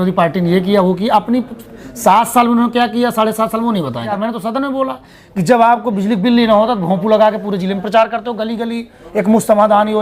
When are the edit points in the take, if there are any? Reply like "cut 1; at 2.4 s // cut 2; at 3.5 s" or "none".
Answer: cut 1; at 4.0 s